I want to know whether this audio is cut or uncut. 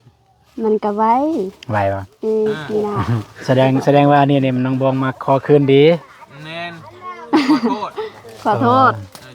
cut